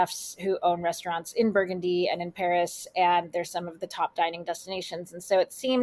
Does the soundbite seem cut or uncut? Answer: uncut